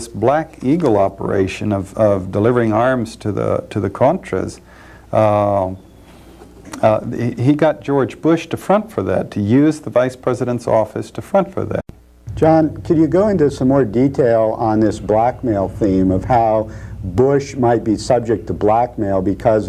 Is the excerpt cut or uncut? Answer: uncut